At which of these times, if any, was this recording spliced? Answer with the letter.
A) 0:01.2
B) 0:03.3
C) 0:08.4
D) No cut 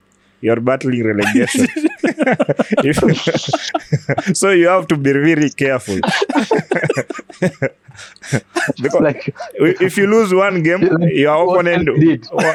D